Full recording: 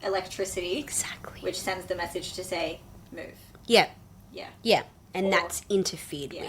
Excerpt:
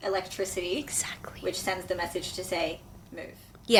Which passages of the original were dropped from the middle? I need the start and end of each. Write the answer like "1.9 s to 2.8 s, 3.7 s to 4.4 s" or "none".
none